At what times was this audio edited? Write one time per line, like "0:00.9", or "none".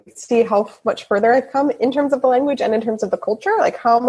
none

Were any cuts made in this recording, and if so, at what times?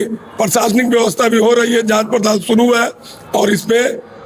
none

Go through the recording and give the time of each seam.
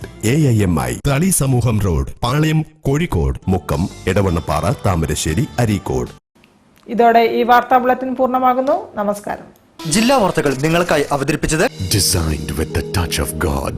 none

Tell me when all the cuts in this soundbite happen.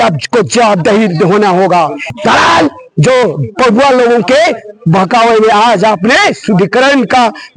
0:02.1

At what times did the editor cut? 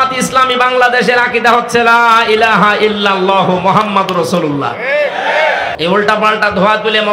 0:05.7

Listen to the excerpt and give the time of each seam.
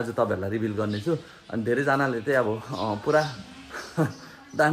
none

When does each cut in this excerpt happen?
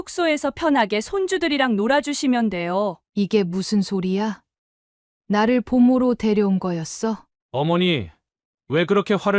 0:03.0
0:07.3

